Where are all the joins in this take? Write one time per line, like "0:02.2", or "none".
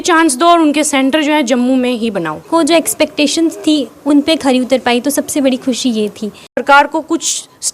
0:02.3
0:06.6